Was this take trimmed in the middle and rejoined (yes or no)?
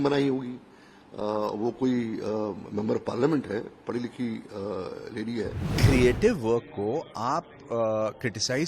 yes